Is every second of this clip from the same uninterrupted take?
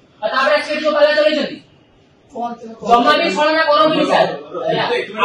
yes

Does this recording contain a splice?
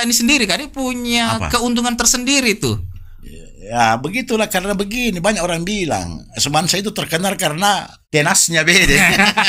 yes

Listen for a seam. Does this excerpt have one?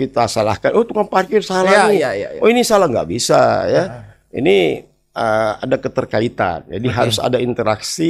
no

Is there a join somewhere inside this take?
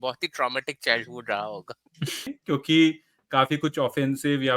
yes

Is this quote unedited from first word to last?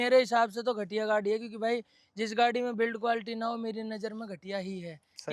yes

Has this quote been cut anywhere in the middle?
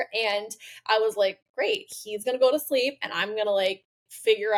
no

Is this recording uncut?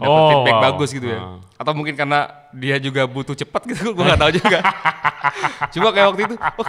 yes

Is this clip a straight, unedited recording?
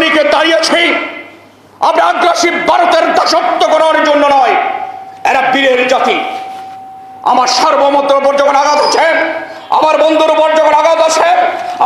yes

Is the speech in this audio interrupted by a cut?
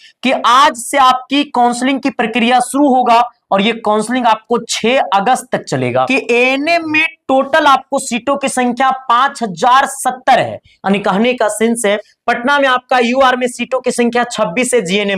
yes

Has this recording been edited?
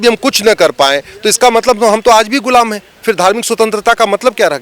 no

